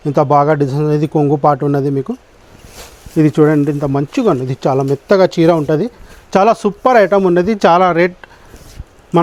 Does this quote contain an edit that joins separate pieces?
no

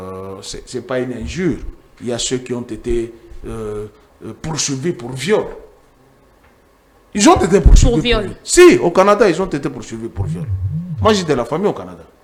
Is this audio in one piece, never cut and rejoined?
yes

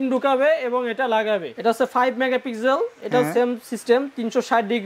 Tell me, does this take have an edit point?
yes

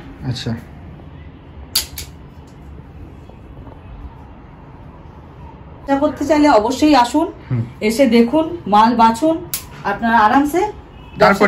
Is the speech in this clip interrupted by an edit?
no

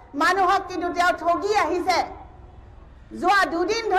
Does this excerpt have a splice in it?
no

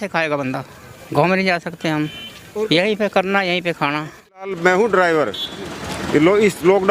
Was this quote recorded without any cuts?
no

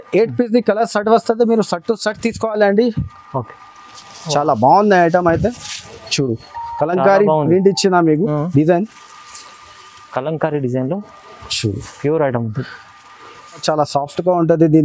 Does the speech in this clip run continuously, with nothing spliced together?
no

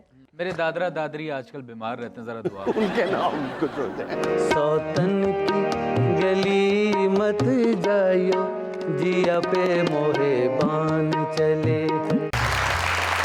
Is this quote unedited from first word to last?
no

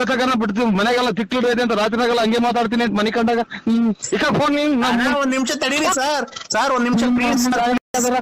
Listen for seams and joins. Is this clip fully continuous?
yes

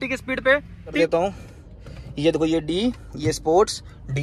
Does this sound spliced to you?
yes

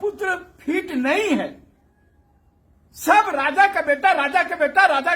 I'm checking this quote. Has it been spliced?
no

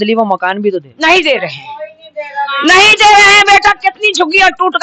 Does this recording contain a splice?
no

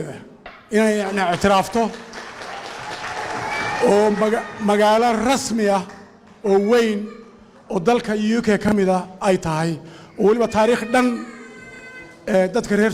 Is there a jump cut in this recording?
no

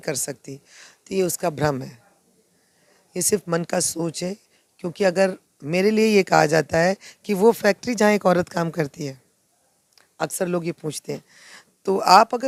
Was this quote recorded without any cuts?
yes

